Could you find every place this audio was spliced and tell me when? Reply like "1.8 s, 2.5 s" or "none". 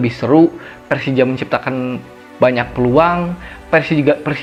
none